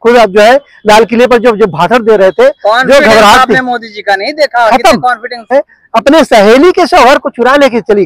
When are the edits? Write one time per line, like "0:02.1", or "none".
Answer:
0:05.5